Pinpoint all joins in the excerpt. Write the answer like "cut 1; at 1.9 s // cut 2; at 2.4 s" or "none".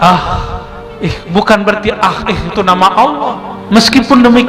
cut 1; at 3.5 s